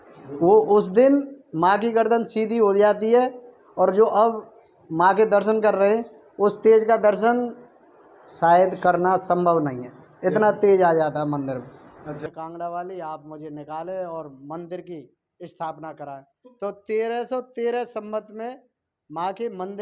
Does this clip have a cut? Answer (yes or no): yes